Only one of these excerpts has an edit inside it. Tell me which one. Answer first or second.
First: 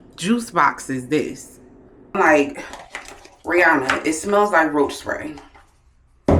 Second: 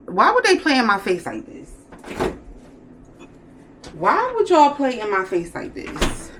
first